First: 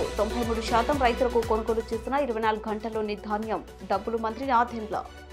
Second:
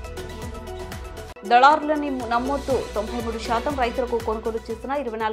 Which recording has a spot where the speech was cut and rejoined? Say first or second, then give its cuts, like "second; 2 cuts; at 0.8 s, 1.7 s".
second; 1 cut; at 1.4 s